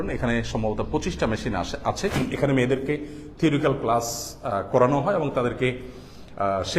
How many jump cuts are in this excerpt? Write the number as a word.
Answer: one